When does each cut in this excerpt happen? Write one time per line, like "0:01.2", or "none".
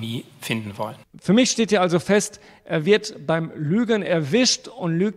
0:01.1